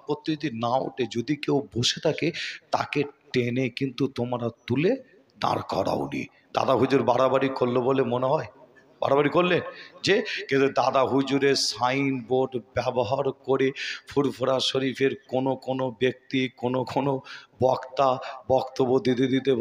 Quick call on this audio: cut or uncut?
uncut